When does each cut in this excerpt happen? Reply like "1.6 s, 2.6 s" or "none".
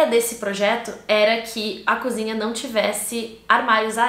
none